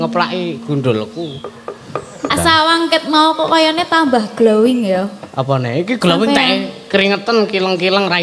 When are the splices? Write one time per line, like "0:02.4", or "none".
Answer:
0:02.3